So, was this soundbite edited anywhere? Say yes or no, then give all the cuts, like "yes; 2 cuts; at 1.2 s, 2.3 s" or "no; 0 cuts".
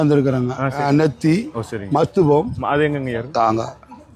yes; 1 cut; at 1.1 s